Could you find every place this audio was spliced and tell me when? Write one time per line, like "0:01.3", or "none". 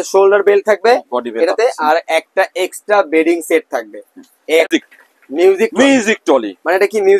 0:04.7